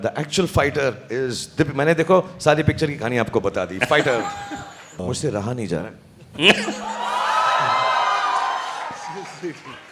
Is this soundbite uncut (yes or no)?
no